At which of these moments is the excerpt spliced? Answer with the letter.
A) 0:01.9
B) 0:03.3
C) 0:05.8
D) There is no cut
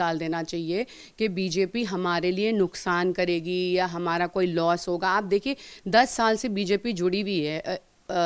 D